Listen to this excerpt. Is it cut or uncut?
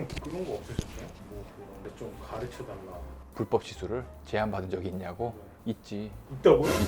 uncut